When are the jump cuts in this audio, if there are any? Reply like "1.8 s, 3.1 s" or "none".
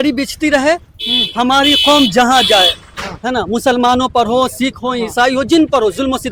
none